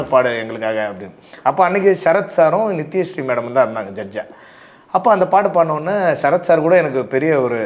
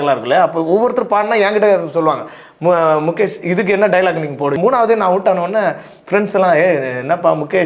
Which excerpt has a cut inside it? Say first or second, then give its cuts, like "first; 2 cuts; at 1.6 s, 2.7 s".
second; 1 cut; at 4.6 s